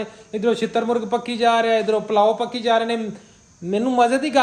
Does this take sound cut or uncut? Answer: uncut